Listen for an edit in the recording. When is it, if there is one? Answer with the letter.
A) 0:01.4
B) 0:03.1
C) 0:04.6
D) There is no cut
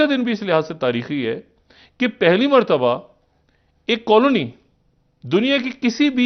D